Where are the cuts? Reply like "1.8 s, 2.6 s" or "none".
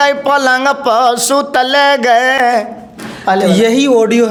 none